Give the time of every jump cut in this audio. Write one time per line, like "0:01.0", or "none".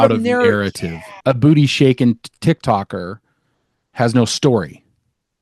0:01.2